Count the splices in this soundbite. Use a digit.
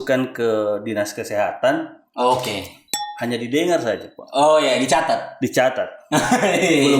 0